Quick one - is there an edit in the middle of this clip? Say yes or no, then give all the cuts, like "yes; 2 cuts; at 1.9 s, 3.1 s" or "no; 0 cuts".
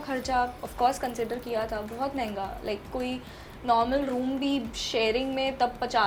no; 0 cuts